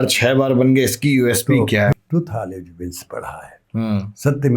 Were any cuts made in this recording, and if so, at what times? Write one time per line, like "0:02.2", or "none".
0:01.9